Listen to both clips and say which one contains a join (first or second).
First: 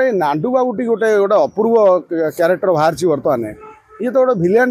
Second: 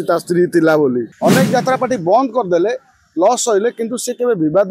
second